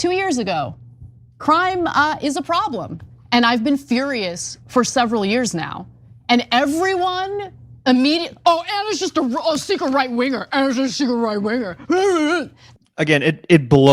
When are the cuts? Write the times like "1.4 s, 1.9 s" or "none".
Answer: 3.0 s, 12.6 s